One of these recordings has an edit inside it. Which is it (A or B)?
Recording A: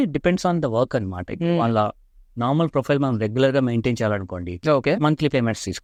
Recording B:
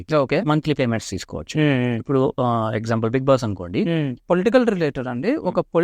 B